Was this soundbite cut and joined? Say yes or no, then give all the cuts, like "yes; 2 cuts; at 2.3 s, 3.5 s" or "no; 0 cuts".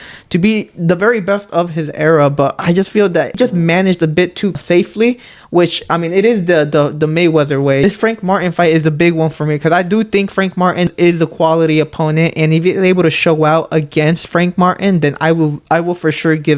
yes; 4 cuts; at 3.4 s, 4.6 s, 7.8 s, 10.9 s